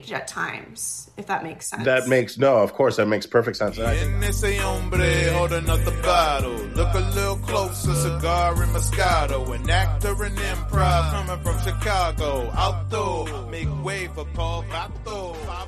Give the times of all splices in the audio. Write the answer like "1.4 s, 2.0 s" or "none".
3.8 s